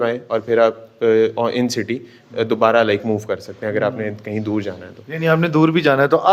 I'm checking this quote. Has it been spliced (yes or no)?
no